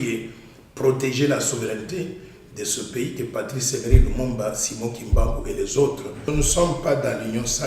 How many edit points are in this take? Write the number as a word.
one